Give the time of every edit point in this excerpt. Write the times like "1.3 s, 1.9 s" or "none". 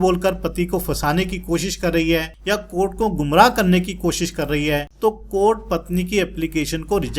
2.3 s, 4.9 s